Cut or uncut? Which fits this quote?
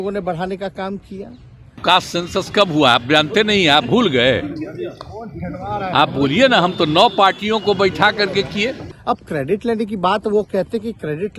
cut